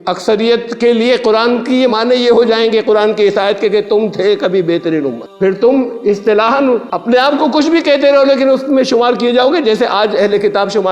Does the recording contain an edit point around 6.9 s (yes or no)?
yes